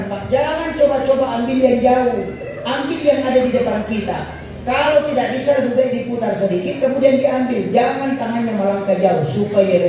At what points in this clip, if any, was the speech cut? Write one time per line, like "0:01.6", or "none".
none